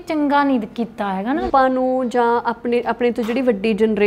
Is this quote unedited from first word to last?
no; 1 cut; at 1.4 s

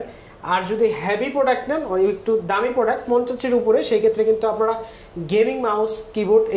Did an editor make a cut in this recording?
no; 0 cuts

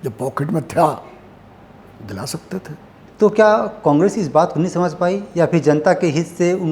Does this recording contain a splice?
yes; 1 cut; at 3.0 s

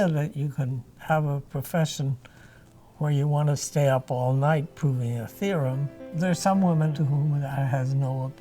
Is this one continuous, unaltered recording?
no; 2 cuts; at 6.0 s, 6.9 s

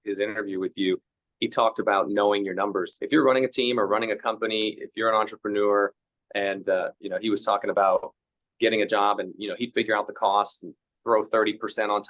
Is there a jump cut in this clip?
yes; 1 cut; at 3.0 s

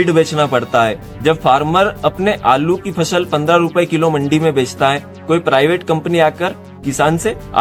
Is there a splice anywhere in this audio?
no; 0 cuts

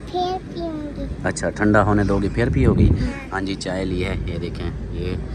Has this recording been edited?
no; 0 cuts

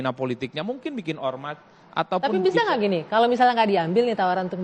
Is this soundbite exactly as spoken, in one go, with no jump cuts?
yes; 0 cuts

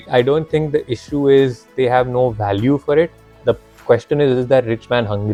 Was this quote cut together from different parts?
no; 0 cuts

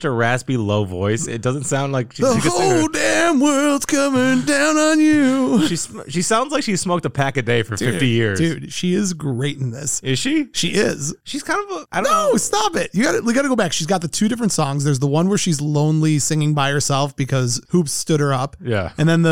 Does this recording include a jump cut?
no; 0 cuts

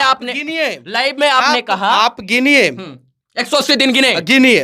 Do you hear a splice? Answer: no; 0 cuts

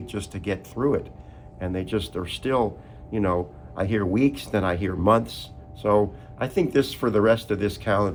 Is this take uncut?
yes; 0 cuts

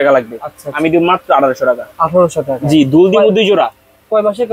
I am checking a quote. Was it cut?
no; 0 cuts

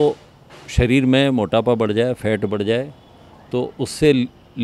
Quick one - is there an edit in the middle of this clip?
no; 0 cuts

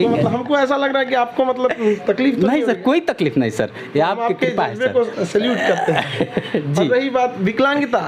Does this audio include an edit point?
no; 0 cuts

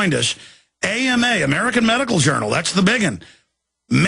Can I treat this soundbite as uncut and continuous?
yes; 0 cuts

